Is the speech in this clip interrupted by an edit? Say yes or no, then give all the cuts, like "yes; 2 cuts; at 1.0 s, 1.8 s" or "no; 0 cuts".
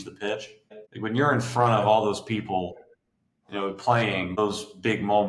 yes; 1 cut; at 4.4 s